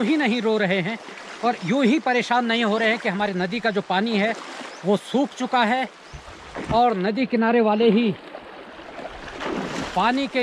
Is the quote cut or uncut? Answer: uncut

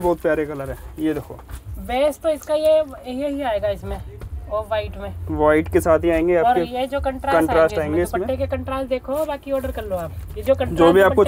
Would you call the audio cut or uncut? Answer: uncut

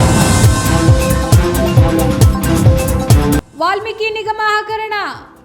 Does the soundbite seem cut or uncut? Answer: cut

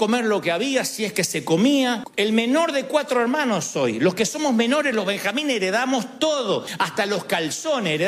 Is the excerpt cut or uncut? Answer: uncut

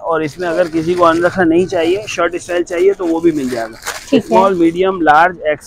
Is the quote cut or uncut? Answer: uncut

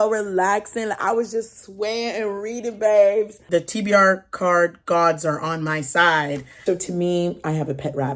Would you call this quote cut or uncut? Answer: cut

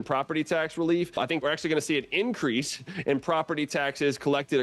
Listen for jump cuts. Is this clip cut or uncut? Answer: cut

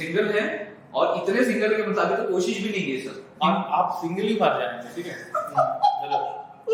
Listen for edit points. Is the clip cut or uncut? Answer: uncut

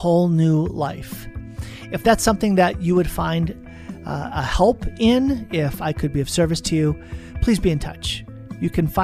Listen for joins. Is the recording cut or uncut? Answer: uncut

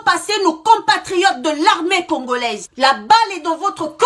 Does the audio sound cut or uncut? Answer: uncut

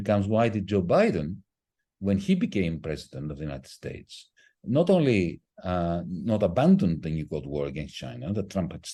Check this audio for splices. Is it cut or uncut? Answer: uncut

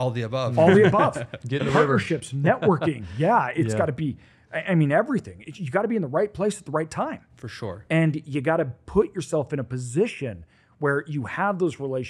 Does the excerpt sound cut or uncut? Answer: uncut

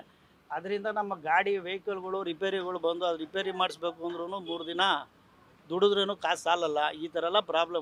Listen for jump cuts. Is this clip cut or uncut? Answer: uncut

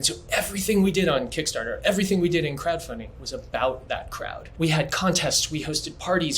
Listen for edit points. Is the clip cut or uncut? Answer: cut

